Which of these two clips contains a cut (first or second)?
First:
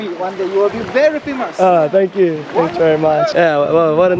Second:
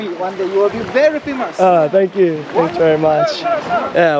first